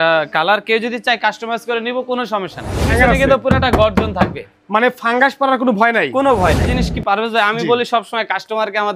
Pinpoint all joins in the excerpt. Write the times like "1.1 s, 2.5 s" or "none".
2.9 s, 6.7 s